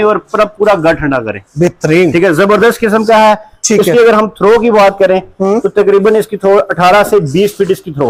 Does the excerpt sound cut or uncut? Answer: uncut